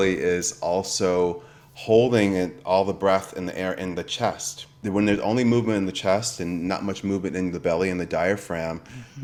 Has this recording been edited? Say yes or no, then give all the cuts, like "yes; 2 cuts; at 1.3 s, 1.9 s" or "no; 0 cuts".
no; 0 cuts